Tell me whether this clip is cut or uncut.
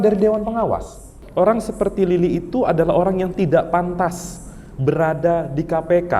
cut